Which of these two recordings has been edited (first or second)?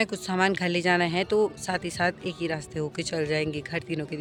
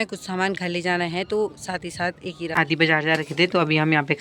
second